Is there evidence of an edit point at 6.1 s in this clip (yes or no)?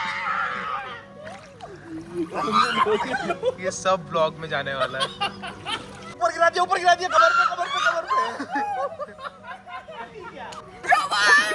yes